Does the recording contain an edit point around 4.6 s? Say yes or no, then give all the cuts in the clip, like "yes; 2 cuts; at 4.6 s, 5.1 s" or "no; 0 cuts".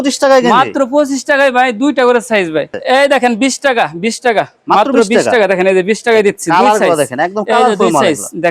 no; 1 cut; at 2.7 s